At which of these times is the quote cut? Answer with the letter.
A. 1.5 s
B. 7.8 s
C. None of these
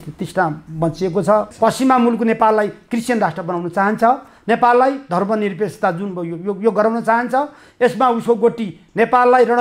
A